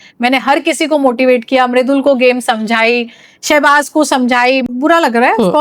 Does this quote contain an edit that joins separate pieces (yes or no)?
yes